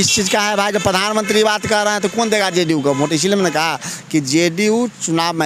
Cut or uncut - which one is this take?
uncut